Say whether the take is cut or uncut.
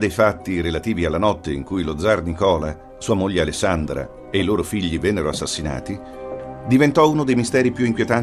cut